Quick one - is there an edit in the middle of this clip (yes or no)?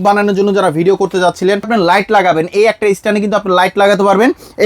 yes